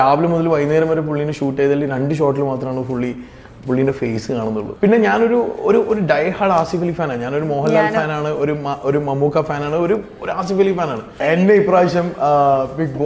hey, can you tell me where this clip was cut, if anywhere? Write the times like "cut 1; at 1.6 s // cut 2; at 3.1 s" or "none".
cut 1; at 4.7 s // cut 2; at 11.2 s